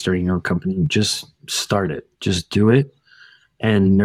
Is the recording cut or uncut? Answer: uncut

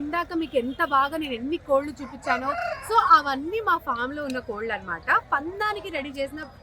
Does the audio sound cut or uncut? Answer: uncut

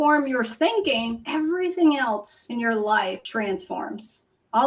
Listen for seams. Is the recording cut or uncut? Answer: cut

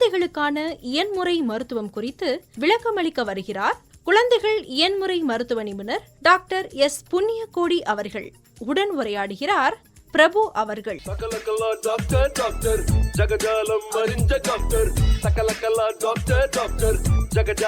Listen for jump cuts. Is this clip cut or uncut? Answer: cut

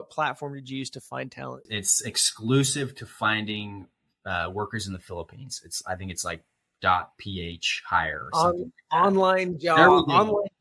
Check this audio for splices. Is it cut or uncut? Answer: cut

